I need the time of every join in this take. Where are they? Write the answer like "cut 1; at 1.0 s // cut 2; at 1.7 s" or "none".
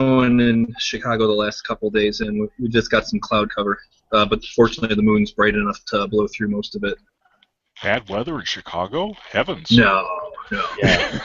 cut 1; at 1.8 s